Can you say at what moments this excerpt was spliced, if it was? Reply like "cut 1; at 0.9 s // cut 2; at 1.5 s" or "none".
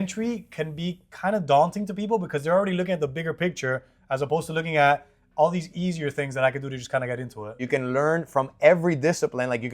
cut 1; at 7.6 s